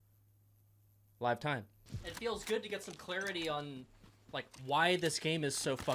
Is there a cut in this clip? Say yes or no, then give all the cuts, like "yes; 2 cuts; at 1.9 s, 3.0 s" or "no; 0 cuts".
yes; 1 cut; at 1.8 s